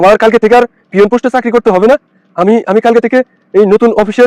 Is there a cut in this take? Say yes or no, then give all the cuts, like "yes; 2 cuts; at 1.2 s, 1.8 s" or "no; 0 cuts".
no; 0 cuts